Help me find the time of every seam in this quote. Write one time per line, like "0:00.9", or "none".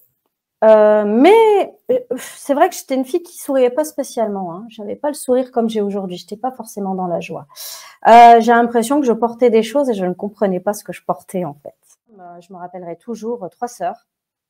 0:12.4